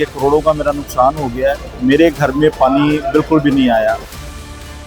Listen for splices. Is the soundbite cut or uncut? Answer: cut